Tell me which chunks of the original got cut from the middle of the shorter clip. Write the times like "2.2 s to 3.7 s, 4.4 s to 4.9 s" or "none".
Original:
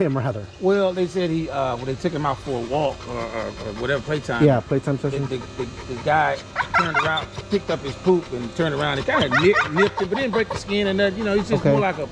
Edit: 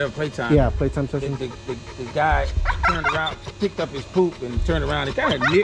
none